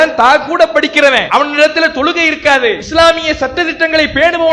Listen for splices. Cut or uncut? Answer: cut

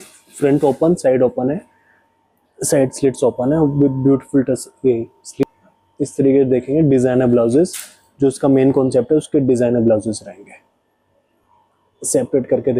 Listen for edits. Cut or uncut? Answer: uncut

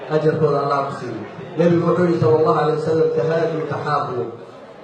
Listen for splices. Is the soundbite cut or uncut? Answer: cut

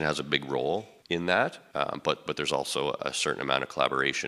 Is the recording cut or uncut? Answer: cut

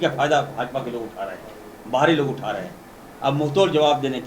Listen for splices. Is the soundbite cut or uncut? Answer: uncut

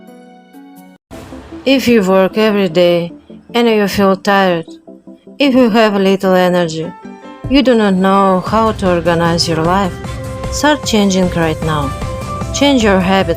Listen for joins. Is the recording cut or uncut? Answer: cut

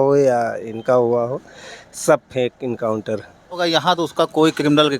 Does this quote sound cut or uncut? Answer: cut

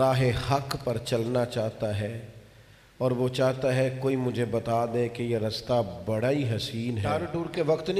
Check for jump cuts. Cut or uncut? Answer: cut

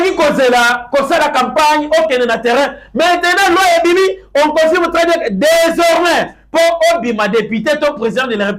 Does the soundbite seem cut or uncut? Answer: uncut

